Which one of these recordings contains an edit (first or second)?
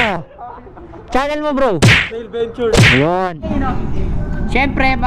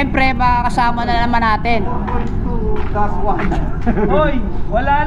first